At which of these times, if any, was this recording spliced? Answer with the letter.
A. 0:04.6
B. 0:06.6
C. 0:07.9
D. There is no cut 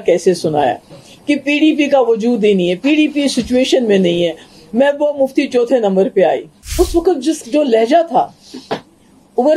B